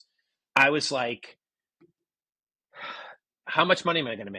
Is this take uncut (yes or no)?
yes